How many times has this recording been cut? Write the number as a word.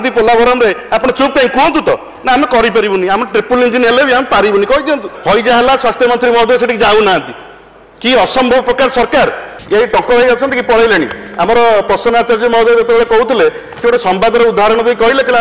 two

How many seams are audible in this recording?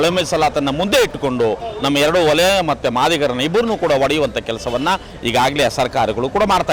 zero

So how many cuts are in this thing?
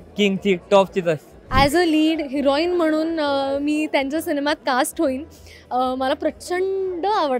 one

